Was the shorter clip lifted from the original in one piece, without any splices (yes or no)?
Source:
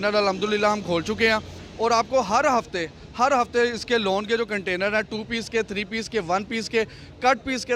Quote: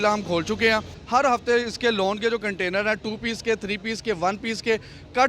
no